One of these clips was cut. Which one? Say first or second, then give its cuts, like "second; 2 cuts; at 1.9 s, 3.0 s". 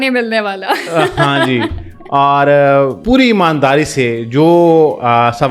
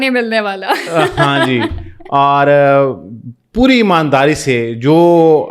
first; 1 cut; at 3.0 s